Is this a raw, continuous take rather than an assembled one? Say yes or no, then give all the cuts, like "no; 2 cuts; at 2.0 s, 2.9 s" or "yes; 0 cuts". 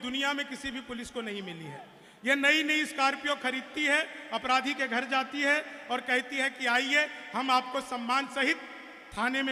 yes; 0 cuts